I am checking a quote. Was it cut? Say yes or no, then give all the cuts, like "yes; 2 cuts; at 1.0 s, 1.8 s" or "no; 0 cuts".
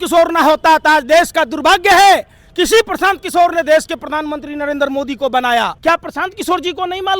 yes; 1 cut; at 5.8 s